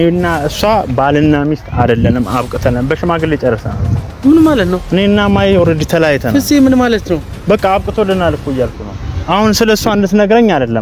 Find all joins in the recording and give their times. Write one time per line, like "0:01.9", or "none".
none